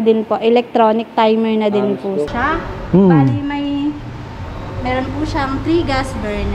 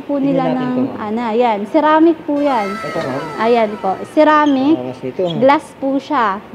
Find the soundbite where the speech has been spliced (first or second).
first